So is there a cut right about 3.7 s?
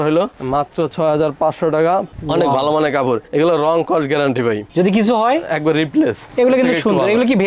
no; 2 cuts; at 2.1 s, 6.2 s

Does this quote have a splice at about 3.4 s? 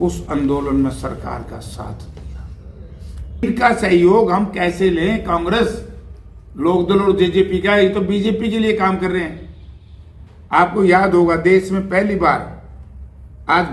yes; 1 cut; at 3.4 s

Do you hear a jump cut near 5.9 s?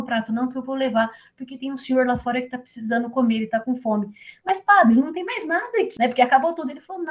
yes; 1 cut; at 5.9 s

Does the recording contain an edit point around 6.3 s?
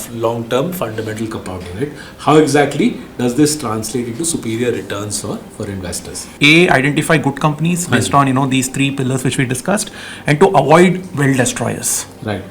yes; 1 cut; at 6.3 s

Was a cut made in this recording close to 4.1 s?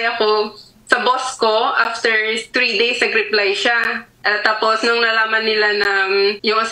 yes; 2 cuts; at 2.5 s, 4.1 s

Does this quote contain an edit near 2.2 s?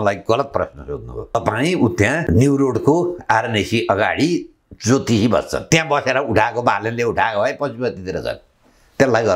yes; 3 cuts; at 1.3 s, 2.2 s, 5.6 s

